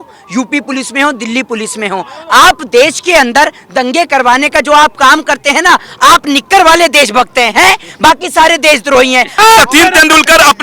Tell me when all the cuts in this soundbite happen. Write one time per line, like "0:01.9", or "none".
0:09.3